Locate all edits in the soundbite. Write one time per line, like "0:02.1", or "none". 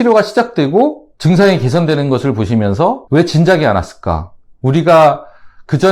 0:01.1
0:03.0